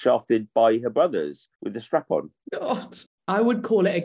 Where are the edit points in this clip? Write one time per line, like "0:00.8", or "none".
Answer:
0:02.9